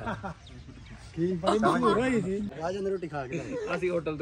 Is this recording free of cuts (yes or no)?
no